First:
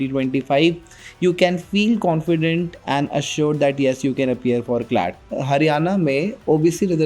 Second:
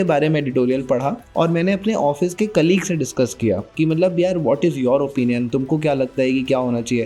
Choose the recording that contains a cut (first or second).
first